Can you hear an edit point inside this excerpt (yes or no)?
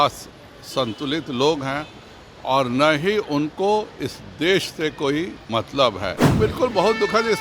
yes